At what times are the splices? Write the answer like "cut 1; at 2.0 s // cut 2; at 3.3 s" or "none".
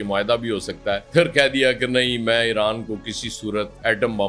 cut 1; at 1.0 s

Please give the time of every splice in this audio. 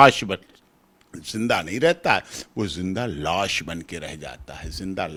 none

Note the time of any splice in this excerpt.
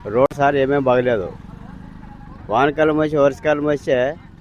none

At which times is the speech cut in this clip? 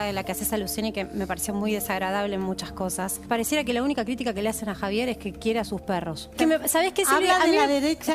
cut 1; at 3.2 s // cut 2; at 6.3 s

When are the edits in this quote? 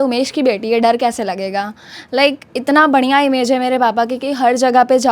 none

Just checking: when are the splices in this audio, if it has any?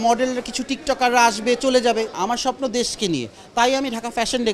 cut 1; at 2.1 s

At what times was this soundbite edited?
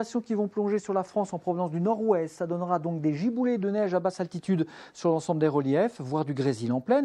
cut 1; at 2.0 s

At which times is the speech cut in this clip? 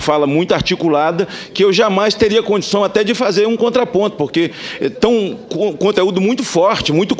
none

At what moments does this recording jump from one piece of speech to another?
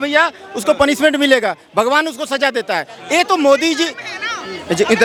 none

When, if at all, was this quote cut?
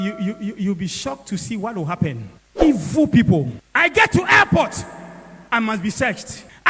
cut 1; at 3.6 s

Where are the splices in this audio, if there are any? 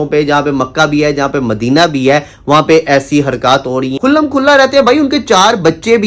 cut 1; at 3.9 s

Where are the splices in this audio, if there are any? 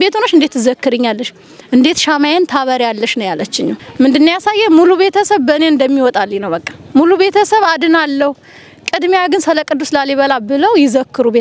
cut 1; at 3.8 s

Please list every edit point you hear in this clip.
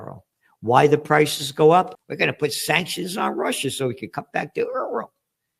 cut 1; at 2.0 s

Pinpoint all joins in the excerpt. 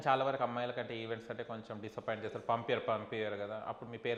none

